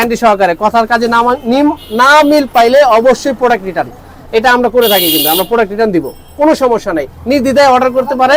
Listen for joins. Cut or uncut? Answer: uncut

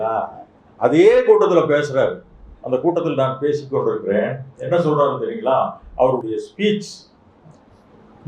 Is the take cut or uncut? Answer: uncut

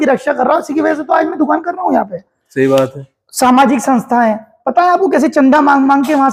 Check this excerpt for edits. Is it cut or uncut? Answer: uncut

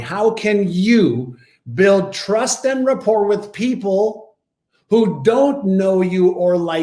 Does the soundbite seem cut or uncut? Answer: uncut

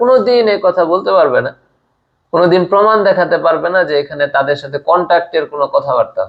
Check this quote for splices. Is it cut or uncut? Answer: uncut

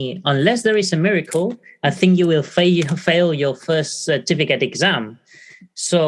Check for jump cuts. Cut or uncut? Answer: uncut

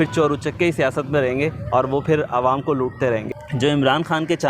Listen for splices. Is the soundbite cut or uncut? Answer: cut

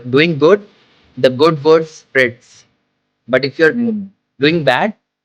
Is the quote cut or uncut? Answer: uncut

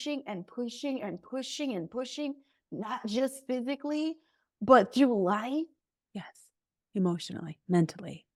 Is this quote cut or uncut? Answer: uncut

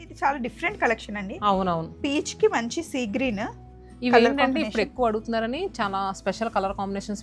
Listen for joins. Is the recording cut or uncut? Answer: uncut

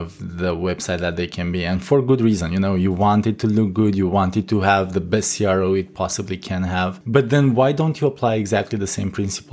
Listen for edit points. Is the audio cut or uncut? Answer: cut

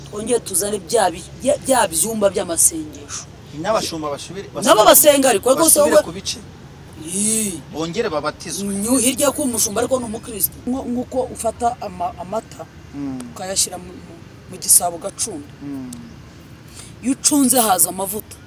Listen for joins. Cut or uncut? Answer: cut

